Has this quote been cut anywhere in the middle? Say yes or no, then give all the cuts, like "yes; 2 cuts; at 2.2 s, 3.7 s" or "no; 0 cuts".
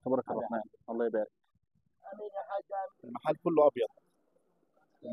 yes; 1 cut; at 2.9 s